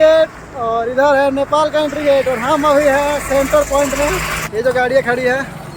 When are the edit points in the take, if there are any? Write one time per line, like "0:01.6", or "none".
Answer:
0:04.4